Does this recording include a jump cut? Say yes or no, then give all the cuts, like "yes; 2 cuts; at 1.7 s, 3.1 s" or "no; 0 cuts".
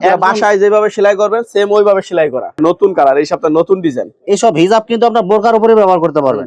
yes; 1 cut; at 2.6 s